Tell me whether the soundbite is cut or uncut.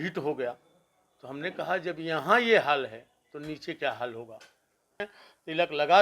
cut